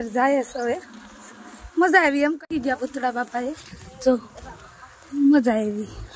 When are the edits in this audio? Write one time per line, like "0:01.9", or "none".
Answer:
0:02.4